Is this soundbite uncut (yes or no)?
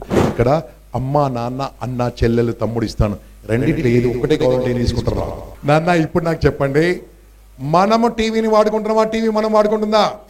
no